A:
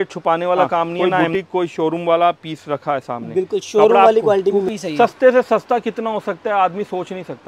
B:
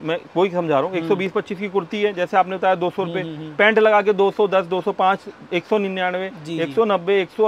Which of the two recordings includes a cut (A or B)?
A